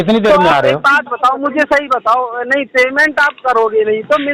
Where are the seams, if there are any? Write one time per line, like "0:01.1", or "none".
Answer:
none